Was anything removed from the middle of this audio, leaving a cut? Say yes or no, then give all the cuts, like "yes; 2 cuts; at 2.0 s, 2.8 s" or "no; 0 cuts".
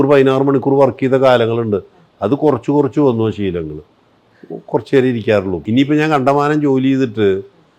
no; 0 cuts